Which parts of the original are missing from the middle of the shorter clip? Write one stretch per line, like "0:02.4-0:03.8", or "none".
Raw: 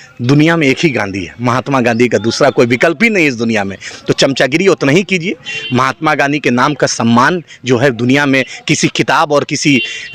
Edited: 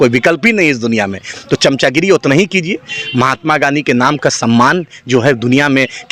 none